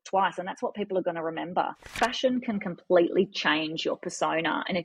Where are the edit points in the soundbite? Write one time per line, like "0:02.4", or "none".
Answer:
0:01.9